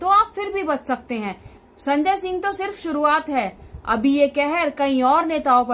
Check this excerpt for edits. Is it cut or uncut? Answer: cut